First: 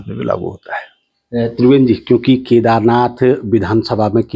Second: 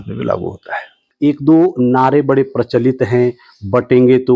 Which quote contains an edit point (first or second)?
second